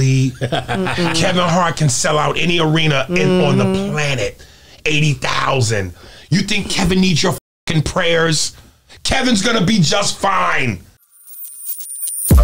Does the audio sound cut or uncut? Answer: cut